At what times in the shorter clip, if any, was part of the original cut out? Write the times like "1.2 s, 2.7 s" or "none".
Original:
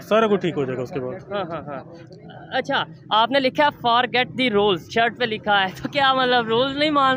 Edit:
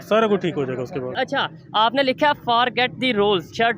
1.1 s